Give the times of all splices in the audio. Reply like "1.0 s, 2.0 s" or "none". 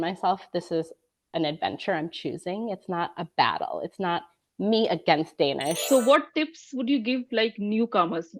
5.8 s